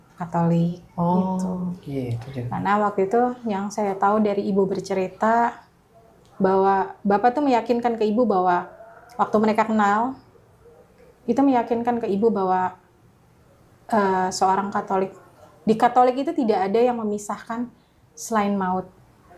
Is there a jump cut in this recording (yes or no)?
no